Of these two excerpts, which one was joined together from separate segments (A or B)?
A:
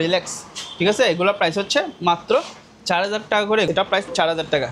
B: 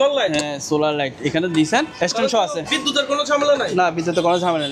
A